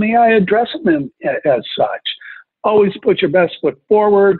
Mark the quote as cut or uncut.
cut